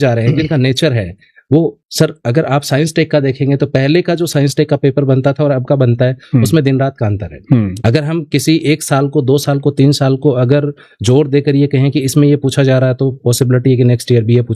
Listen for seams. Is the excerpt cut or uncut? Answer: cut